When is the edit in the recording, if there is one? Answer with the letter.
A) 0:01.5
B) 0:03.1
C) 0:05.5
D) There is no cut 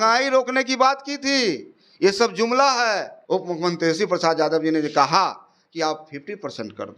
B